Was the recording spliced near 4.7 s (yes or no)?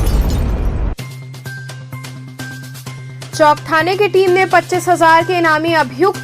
no